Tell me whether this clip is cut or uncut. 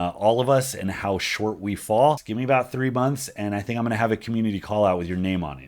cut